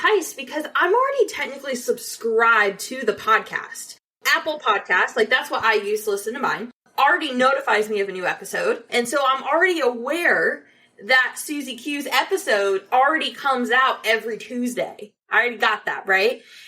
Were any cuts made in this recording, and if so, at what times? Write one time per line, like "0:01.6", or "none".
0:04.2
0:08.9